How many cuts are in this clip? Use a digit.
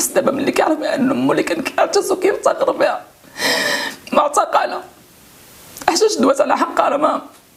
0